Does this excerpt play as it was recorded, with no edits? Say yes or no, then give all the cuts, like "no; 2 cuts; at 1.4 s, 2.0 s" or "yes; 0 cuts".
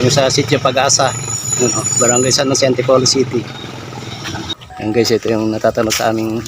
no; 1 cut; at 4.5 s